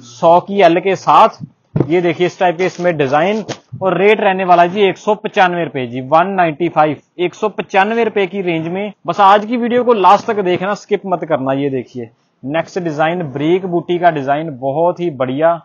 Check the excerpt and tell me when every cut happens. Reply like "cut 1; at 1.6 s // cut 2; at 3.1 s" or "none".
none